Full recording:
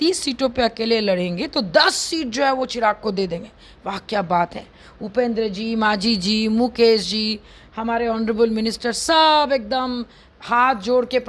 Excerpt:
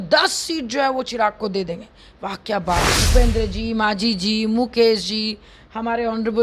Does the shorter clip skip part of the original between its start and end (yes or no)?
yes